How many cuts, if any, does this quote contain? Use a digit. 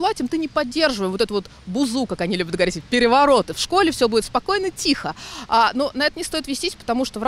0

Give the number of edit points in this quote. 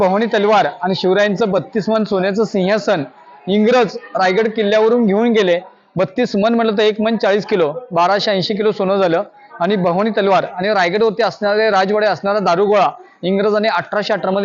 0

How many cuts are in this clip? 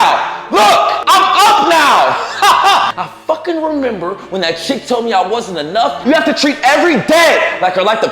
3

